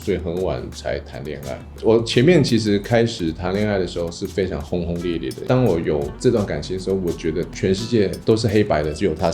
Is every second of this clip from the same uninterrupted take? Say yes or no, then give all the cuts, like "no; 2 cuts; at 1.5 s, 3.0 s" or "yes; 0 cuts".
no; 2 cuts; at 1.6 s, 5.4 s